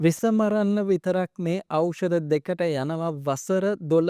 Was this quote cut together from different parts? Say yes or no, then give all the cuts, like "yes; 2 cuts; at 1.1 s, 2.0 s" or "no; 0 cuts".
no; 0 cuts